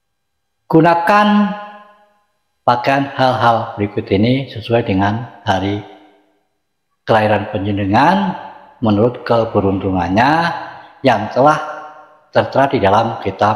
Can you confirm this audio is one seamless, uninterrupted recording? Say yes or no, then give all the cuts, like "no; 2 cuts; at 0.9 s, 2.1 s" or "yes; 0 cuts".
yes; 0 cuts